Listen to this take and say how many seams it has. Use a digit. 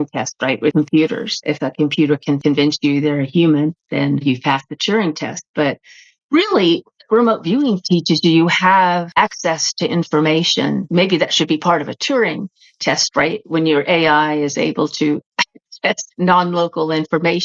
5